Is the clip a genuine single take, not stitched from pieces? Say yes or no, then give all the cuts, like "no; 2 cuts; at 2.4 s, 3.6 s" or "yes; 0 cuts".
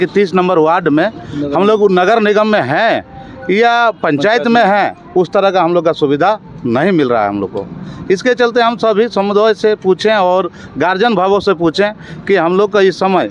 yes; 0 cuts